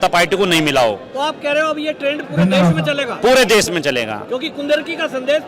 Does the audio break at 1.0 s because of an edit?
no; 0 cuts

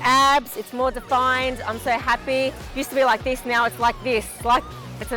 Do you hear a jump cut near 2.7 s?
yes; 1 cut; at 2.7 s

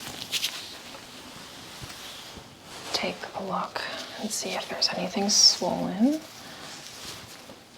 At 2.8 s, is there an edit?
yes; 1 cut; at 2.8 s

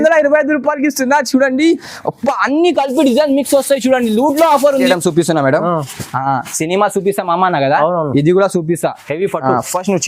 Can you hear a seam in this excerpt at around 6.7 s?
no; 1 cut; at 4.9 s

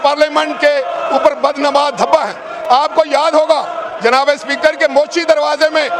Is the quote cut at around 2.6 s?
no; 0 cuts

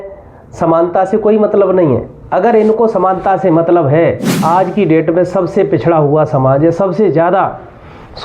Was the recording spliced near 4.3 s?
yes; 1 cut; at 4.3 s

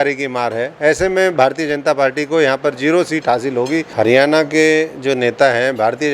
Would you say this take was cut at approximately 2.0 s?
no; 1 cut; at 3.9 s

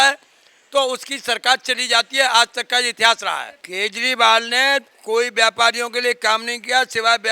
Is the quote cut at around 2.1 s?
no; 1 cut; at 3.6 s

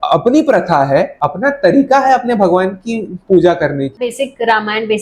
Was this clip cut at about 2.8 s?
no; 2 cuts; at 1.2 s, 4.1 s

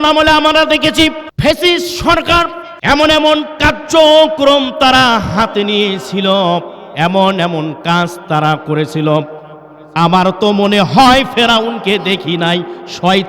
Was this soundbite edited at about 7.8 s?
no; 2 cuts; at 1.3 s, 2.7 s

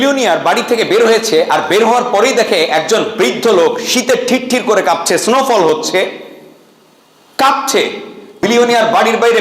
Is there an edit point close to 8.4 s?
yes; 1 cut; at 8.4 s

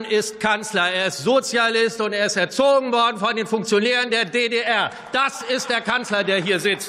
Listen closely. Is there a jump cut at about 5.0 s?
no; 0 cuts

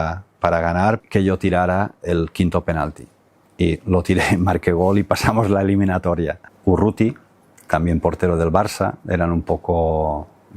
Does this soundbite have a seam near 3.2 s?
no; 2 cuts; at 1.0 s, 6.4 s

